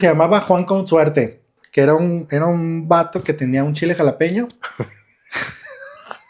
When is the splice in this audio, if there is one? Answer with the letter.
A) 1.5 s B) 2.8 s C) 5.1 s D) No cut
A